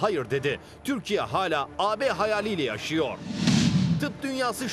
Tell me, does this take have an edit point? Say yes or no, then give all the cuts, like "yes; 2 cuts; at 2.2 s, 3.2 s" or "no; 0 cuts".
yes; 1 cut; at 3.6 s